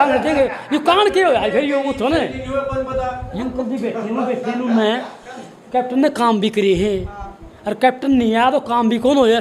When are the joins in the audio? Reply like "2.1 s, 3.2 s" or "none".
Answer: 3.4 s